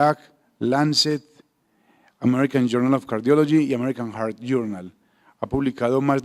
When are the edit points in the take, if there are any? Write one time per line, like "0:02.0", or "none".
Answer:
0:02.4